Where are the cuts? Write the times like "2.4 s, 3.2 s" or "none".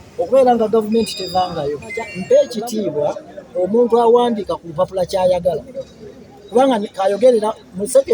2.1 s